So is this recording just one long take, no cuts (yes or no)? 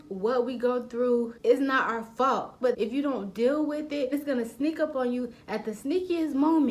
no